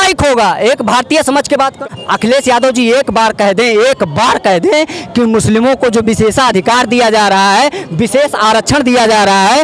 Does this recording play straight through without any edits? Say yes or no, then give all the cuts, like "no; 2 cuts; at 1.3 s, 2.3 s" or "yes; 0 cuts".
no; 1 cut; at 1.8 s